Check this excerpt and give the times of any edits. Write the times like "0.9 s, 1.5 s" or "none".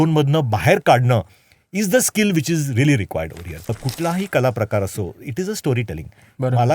3.8 s